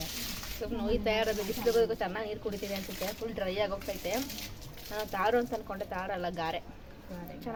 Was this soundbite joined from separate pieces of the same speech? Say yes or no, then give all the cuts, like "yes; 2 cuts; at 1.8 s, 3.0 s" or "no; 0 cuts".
no; 0 cuts